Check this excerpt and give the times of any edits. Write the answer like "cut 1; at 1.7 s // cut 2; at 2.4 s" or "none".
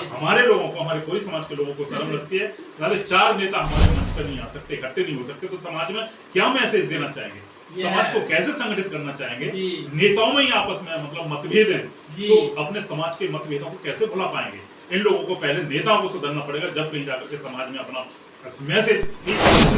none